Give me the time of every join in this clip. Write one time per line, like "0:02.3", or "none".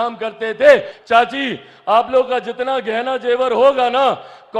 0:00.9